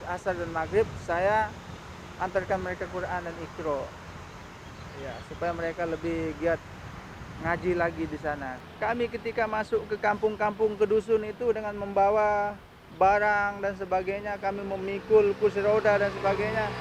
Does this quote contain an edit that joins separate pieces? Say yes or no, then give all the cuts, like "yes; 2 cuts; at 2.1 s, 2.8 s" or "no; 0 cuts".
yes; 1 cut; at 8.6 s